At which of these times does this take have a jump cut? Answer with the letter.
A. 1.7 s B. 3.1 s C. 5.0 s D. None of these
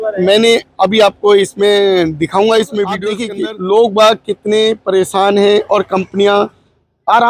B